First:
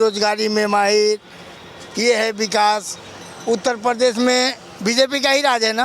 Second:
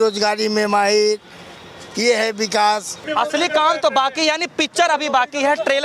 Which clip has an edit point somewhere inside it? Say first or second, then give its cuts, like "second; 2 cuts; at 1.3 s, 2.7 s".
second; 1 cut; at 3.0 s